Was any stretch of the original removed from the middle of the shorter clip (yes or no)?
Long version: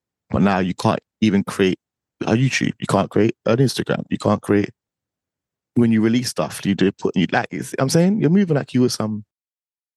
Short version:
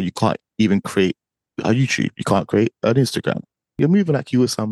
yes